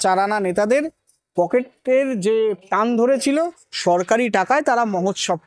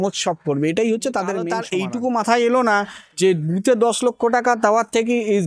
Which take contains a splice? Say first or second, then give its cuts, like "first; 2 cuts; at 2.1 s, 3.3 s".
second; 1 cut; at 1.6 s